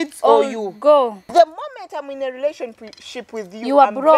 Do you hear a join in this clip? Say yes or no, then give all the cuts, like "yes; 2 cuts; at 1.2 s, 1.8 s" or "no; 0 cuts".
yes; 1 cut; at 1.2 s